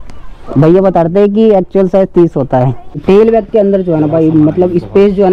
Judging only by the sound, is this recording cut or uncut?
cut